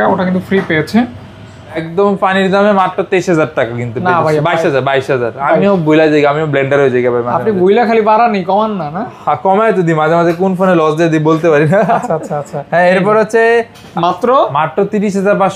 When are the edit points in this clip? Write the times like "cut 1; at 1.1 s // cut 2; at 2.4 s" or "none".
cut 1; at 1.9 s // cut 2; at 13.8 s